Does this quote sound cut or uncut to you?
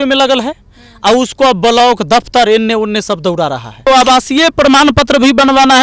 cut